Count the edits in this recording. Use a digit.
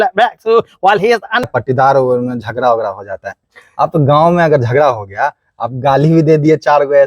1